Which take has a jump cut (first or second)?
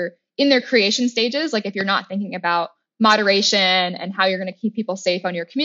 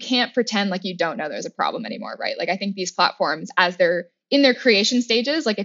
first